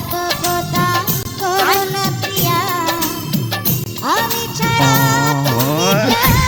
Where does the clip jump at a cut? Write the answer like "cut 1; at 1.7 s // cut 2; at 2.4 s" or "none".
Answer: none